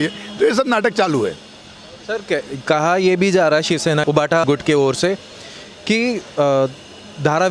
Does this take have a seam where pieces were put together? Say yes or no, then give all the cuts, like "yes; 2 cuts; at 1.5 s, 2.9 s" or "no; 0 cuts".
no; 0 cuts